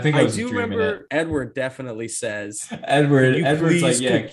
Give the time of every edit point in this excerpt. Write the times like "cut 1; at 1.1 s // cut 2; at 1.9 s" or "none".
cut 1; at 1.0 s

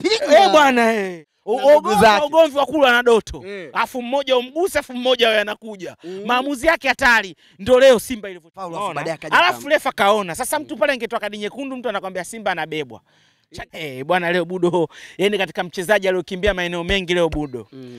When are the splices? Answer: cut 1; at 1.2 s // cut 2; at 8.7 s // cut 3; at 13.5 s

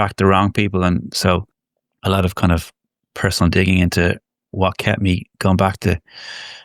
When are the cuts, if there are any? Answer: none

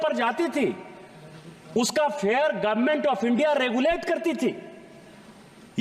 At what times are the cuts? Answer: none

